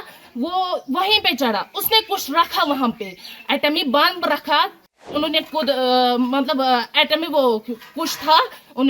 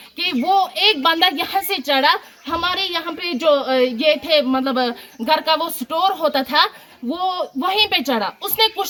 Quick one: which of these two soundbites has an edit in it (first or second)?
first